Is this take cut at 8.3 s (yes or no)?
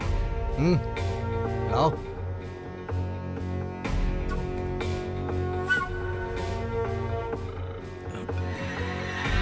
no